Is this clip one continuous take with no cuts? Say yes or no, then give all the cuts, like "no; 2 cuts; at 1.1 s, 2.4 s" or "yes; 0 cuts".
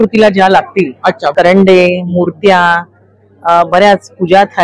no; 1 cut; at 1.3 s